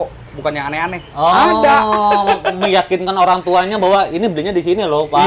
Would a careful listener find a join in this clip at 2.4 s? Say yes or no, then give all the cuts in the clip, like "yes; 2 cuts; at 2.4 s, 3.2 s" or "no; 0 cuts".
no; 0 cuts